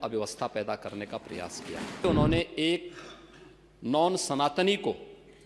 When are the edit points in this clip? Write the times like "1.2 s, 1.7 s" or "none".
2.0 s